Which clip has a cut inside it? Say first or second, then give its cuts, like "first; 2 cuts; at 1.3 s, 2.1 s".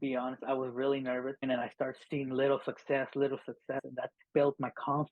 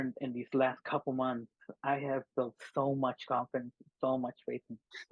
first; 2 cuts; at 1.4 s, 3.9 s